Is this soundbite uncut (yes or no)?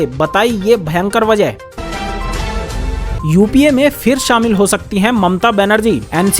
no